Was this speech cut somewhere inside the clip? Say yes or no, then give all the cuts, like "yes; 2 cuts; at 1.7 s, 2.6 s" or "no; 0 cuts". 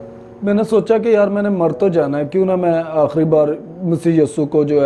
no; 0 cuts